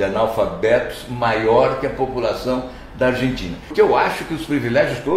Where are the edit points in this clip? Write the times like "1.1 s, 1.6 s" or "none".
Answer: 3.6 s